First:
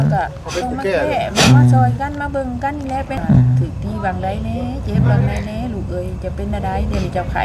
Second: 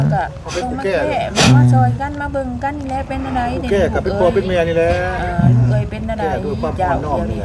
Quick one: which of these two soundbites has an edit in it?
first; 1 cut; at 3.2 s

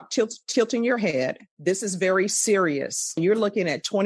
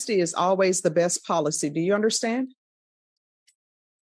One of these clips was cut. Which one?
first; 2 cuts; at 1.5 s, 3.2 s

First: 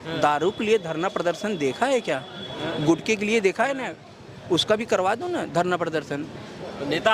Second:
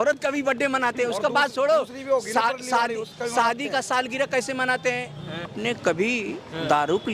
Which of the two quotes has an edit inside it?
second; 1 cut; at 5.5 s

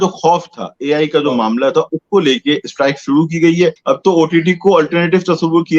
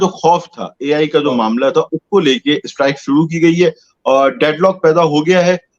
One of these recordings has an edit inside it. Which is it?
first; 1 cut; at 3.8 s

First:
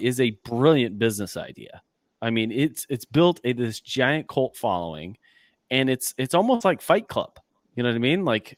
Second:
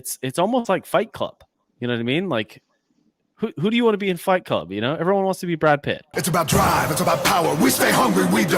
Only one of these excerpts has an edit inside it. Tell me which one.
second; 1 cut; at 6.1 s

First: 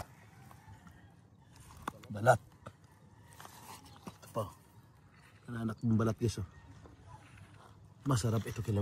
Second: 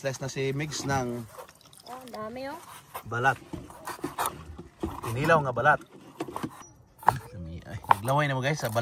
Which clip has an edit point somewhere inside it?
second; 1 cut; at 6.6 s

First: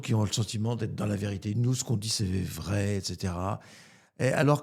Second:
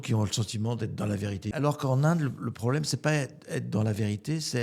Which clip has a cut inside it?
second; 1 cut; at 1.6 s

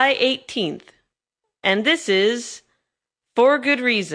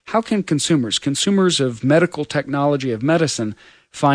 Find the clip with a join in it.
second; 1 cut; at 2.4 s

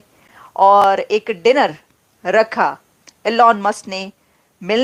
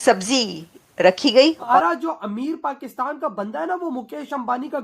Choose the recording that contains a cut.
second; 1 cut; at 1.7 s

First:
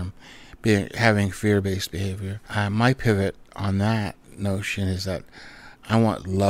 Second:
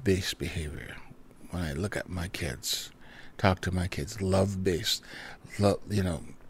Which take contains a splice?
first; 1 cut; at 2.4 s

